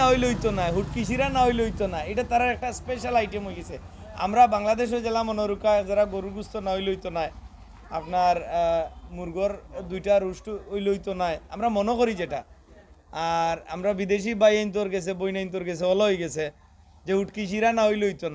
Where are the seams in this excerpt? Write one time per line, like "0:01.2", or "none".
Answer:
none